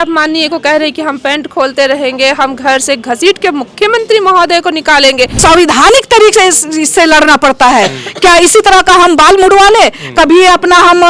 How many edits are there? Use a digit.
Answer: 1